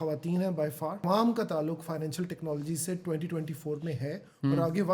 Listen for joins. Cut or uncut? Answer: cut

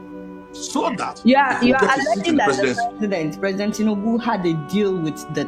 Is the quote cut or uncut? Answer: uncut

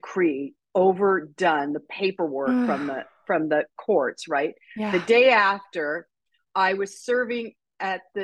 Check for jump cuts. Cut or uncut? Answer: uncut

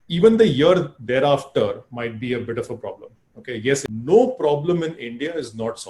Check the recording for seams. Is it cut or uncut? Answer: cut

